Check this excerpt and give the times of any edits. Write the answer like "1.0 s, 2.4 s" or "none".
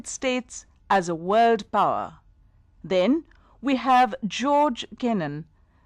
1.9 s